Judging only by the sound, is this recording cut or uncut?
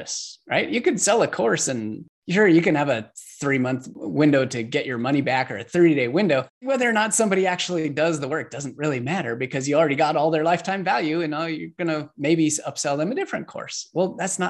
cut